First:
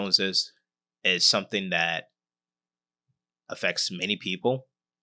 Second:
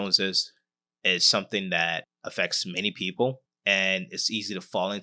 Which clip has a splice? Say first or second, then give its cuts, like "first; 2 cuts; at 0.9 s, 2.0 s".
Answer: second; 2 cuts; at 2.2 s, 3.5 s